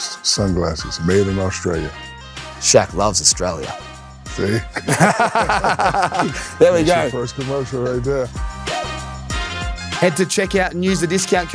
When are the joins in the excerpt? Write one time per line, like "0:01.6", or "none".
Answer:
0:08.4
0:10.0